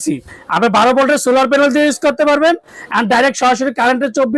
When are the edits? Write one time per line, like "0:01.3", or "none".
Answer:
none